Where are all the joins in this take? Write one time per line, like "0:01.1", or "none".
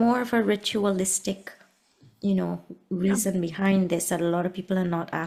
none